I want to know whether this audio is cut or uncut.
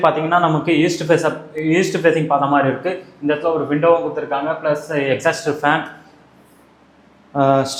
uncut